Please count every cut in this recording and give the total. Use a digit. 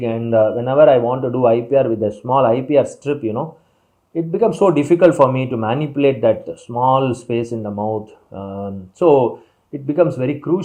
0